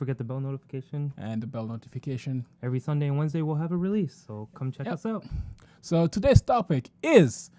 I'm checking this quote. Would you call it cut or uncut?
cut